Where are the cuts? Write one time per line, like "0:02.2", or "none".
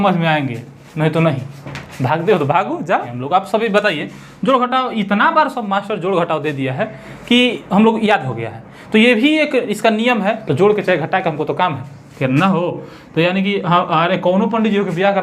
0:03.1
0:10.4